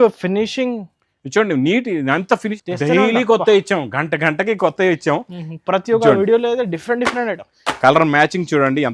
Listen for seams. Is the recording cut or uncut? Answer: cut